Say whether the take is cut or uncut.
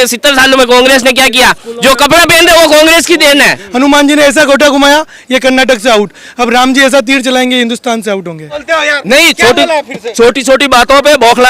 cut